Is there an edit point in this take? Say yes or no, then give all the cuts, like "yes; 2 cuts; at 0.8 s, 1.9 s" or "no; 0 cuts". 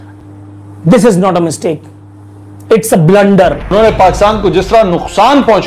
yes; 1 cut; at 3.7 s